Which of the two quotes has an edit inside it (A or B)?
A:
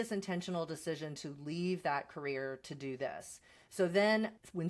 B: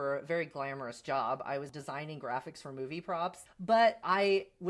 B